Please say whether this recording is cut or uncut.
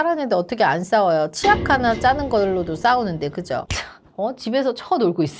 cut